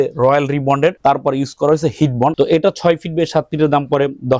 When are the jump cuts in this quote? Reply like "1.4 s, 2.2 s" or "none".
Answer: 1.0 s, 2.3 s

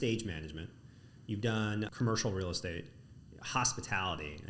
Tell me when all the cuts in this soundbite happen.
1.9 s

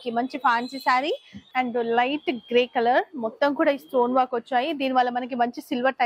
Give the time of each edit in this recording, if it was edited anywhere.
1.5 s

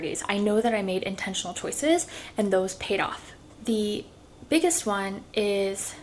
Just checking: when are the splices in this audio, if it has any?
3.3 s

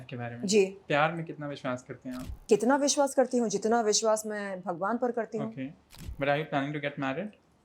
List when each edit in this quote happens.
2.4 s

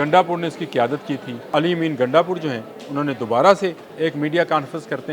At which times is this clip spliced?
1.5 s, 3.8 s

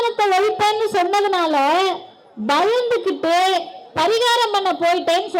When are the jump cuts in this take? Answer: none

